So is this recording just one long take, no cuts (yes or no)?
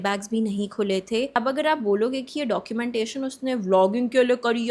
no